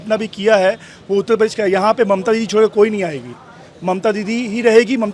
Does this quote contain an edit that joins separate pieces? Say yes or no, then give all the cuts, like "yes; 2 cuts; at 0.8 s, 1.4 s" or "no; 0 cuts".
no; 0 cuts